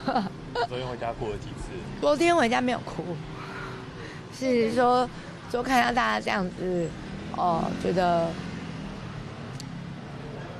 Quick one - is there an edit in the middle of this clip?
yes; 1 cut; at 2.0 s

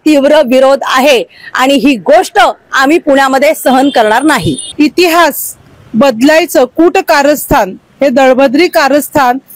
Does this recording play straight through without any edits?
no; 1 cut; at 4.6 s

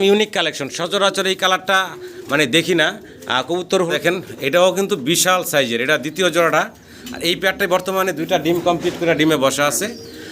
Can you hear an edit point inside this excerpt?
yes; 1 cut; at 3.9 s

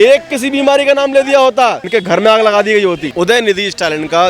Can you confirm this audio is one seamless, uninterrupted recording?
no; 2 cuts; at 1.8 s, 3.0 s

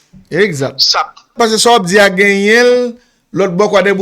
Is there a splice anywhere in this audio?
yes; 1 cut; at 1.3 s

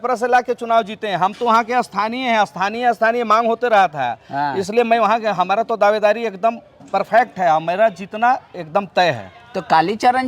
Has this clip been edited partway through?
no; 0 cuts

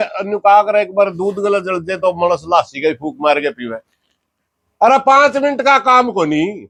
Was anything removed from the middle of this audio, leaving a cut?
no; 0 cuts

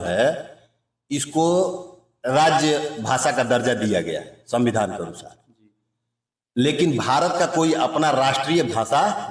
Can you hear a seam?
no; 0 cuts

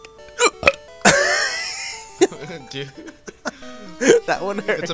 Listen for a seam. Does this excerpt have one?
no; 0 cuts

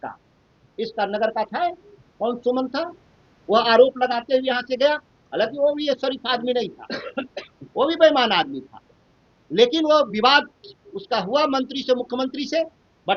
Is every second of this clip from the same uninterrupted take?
yes; 0 cuts

